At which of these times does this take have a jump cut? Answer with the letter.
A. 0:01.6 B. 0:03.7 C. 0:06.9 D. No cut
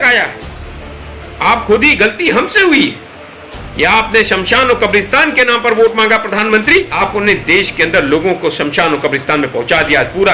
C